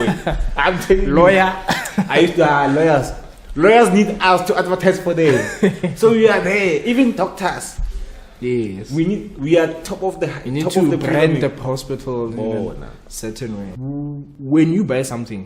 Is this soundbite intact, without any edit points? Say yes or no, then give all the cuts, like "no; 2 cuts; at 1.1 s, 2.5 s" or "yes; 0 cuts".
no; 1 cut; at 13.7 s